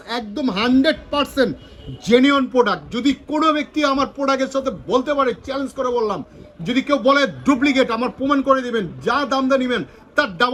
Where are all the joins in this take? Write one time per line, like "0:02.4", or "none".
none